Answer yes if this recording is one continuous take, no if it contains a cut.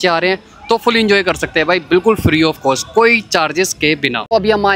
yes